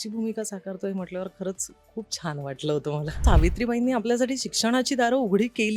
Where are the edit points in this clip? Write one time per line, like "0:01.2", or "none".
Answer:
0:03.2